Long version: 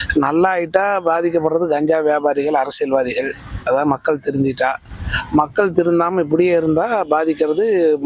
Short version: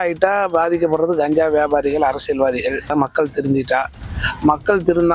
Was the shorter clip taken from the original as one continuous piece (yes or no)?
no